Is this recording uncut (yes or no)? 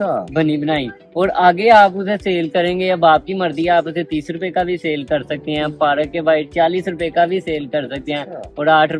yes